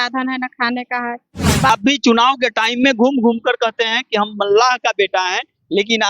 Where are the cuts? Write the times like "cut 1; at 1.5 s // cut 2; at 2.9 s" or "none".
cut 1; at 1.7 s